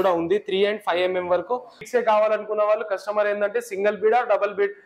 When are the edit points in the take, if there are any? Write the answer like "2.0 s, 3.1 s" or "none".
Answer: 1.7 s